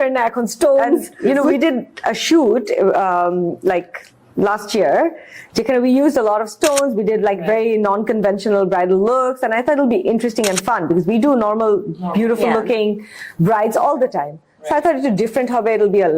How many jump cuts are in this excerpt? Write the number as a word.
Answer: one